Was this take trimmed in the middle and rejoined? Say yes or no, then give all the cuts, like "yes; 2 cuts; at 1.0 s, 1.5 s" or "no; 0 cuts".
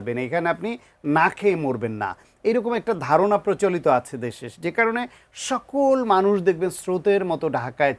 no; 0 cuts